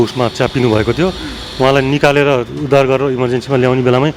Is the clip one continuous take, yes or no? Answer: yes